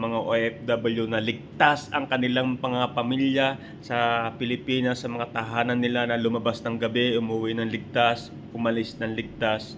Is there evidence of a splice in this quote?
no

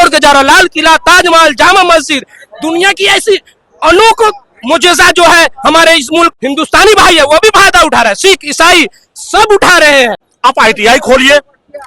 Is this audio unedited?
no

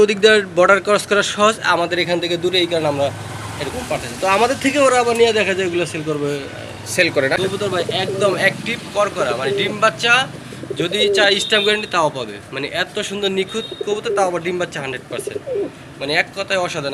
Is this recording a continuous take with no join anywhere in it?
no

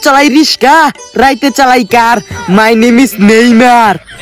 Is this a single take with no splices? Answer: yes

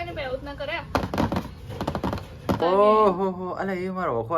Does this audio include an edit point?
yes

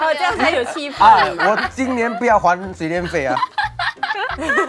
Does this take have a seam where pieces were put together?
no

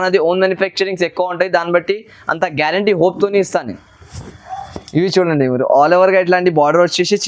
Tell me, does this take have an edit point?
no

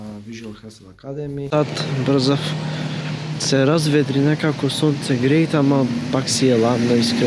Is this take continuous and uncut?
no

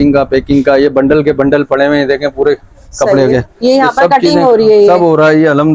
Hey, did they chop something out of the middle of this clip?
no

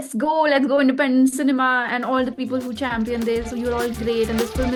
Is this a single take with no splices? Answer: yes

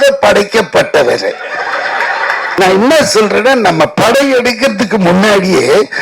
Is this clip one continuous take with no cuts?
no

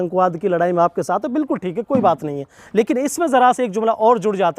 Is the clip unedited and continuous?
yes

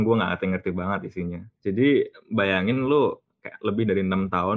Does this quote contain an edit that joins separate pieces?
no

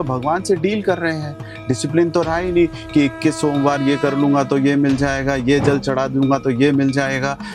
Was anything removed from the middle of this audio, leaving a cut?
no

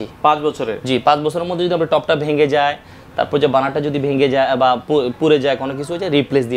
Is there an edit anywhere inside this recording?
no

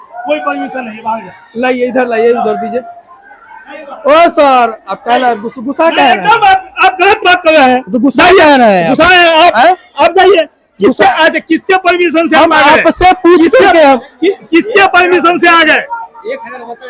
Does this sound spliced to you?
no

